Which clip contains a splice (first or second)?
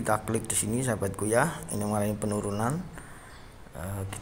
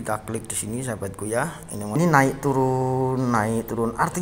second